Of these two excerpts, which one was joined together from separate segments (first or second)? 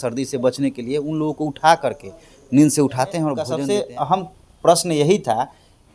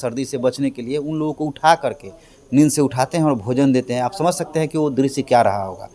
first